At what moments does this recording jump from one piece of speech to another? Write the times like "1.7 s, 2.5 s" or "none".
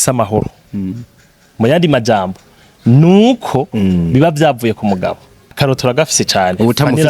5.5 s

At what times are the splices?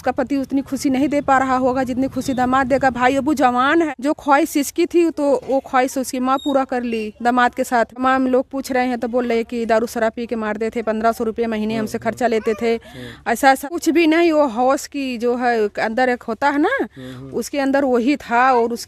3.9 s, 8.0 s, 13.6 s

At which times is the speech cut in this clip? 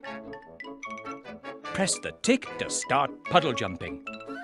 1.0 s

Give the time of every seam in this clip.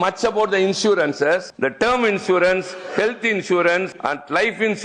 1.5 s, 3.9 s

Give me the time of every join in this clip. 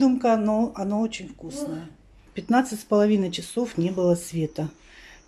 2.3 s

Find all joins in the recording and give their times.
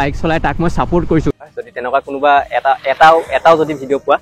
1.3 s

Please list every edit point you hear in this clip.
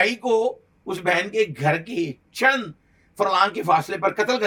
none

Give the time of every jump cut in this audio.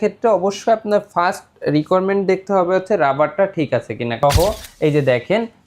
4.2 s

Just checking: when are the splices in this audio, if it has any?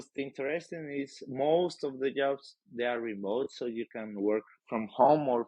none

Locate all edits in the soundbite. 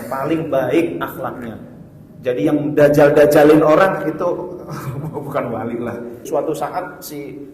6.3 s

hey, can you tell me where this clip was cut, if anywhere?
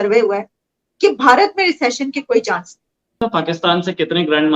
3.2 s

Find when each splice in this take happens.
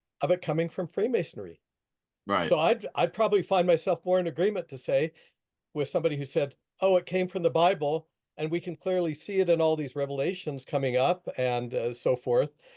none

